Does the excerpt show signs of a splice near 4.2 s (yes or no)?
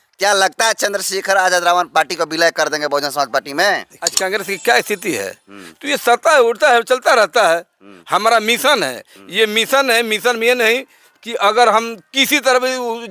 yes